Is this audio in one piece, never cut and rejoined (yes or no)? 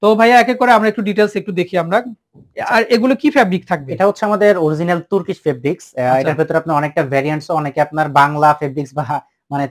yes